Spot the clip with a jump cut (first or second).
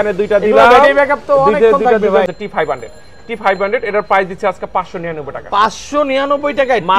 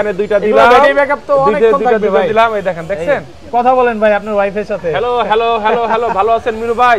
first